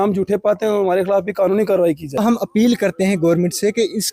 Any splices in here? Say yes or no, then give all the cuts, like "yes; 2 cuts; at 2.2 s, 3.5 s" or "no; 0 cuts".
yes; 1 cut; at 2.2 s